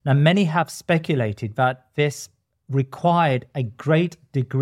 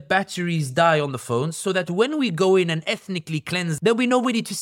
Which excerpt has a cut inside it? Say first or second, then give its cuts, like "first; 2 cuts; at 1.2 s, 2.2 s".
second; 1 cut; at 3.7 s